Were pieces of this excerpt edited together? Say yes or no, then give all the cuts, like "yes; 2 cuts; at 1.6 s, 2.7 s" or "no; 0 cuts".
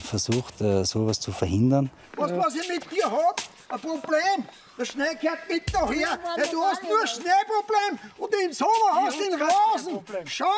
yes; 1 cut; at 2.0 s